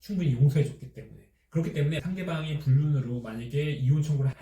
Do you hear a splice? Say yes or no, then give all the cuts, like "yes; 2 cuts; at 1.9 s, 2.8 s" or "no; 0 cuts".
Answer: yes; 1 cut; at 2.0 s